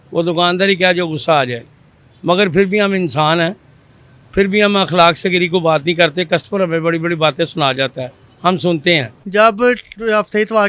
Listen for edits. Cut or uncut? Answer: cut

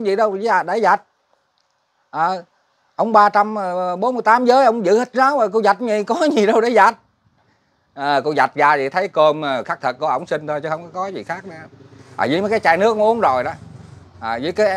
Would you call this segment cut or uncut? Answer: uncut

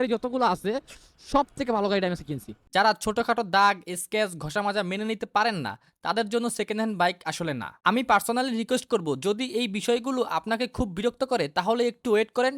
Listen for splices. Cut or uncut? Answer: cut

